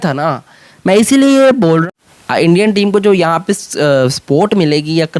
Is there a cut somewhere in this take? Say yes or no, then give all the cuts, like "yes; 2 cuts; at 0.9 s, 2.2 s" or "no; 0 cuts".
yes; 1 cut; at 1.8 s